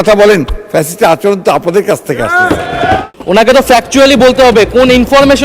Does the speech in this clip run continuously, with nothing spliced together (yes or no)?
no